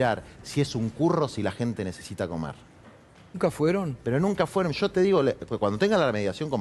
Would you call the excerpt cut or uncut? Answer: cut